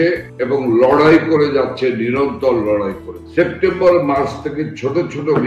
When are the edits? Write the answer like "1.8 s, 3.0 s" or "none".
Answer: 3.2 s